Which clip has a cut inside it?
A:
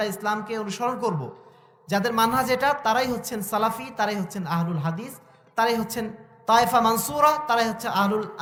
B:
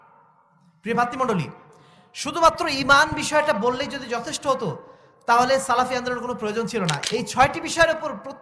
B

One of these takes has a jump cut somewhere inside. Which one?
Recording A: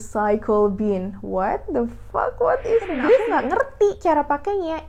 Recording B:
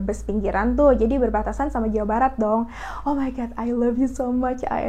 A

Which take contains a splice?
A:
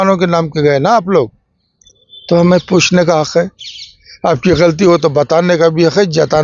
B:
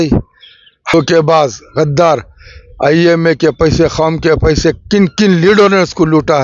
B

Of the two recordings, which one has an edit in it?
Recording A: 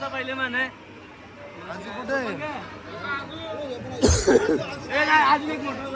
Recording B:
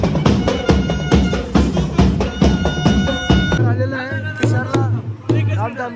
B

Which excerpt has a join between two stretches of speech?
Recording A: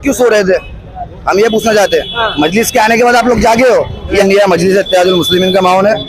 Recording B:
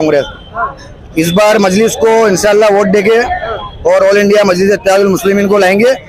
A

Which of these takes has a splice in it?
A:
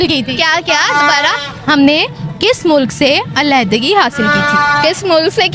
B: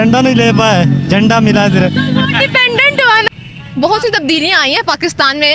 B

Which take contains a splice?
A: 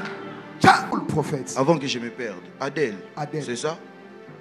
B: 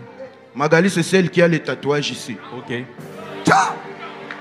A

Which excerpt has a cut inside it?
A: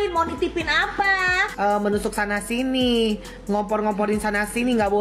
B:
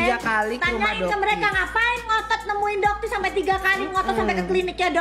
A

